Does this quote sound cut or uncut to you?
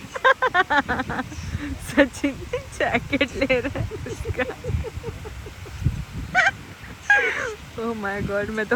uncut